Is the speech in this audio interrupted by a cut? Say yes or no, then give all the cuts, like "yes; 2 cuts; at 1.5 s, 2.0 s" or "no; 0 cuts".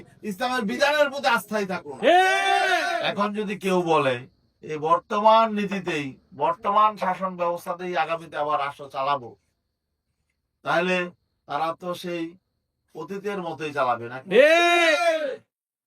yes; 1 cut; at 3.1 s